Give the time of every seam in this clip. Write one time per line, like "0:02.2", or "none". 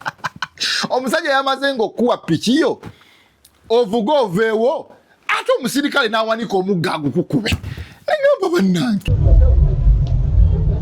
0:09.0